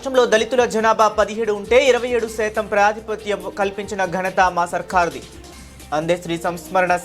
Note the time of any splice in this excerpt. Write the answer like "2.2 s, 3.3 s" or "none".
none